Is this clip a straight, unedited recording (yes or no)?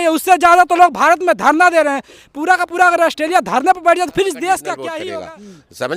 no